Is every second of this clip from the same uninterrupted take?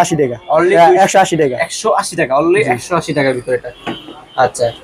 yes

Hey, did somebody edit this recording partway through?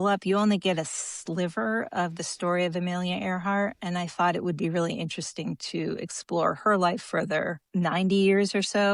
yes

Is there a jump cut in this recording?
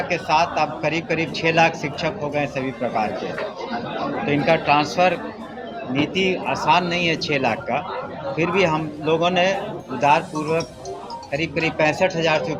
no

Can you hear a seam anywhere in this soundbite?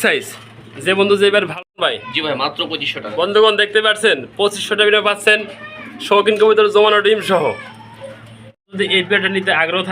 yes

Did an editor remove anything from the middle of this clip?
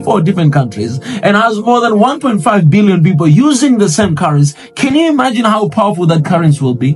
no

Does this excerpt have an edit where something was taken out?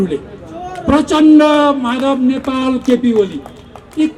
no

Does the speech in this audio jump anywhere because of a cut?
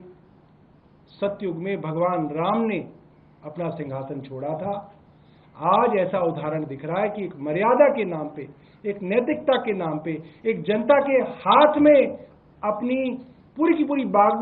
no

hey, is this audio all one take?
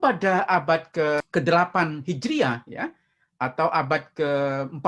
no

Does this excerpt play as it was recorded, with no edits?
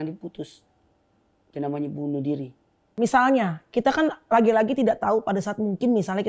no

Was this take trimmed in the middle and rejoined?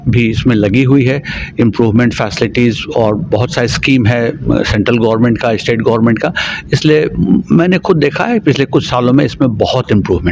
no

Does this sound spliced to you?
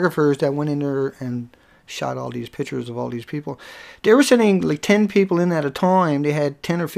no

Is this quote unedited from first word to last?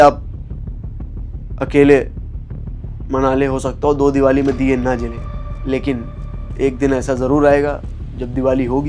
yes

